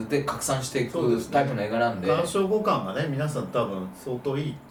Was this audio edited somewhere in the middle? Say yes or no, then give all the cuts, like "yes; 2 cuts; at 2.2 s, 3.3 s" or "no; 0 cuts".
no; 0 cuts